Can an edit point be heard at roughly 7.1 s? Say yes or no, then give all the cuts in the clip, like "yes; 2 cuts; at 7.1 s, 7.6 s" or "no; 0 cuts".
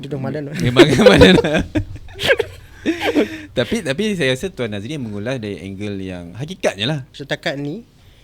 yes; 1 cut; at 7.1 s